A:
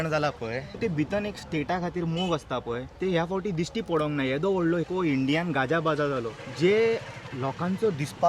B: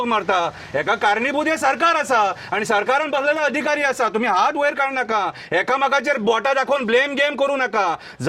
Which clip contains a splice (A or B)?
A